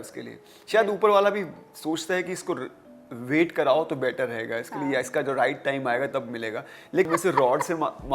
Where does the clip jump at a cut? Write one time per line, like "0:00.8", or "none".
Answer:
0:07.1

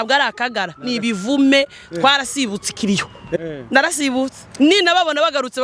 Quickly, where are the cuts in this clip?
0:03.4

